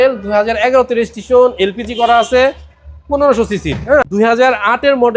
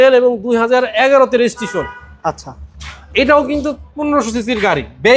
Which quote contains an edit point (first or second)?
first